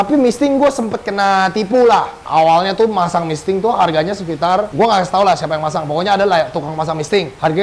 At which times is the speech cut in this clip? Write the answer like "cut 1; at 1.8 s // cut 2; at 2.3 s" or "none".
none